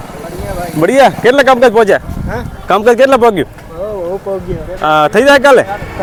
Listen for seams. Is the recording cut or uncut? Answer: uncut